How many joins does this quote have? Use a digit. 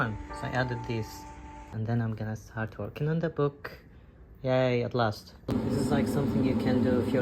2